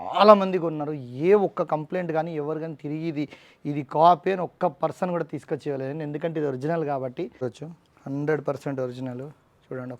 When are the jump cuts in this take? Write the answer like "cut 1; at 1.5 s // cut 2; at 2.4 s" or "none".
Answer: cut 1; at 7.4 s

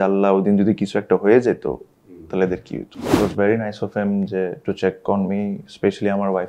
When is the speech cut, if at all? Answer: cut 1; at 3.1 s

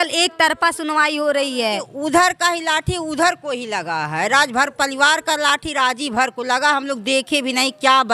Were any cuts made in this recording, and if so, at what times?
cut 1; at 1.6 s

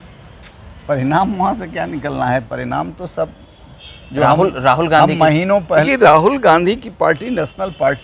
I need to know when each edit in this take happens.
cut 1; at 5.9 s

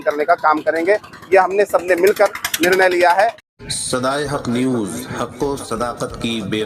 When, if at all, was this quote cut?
cut 1; at 3.4 s

